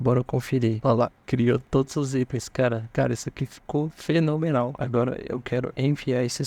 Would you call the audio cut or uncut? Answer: cut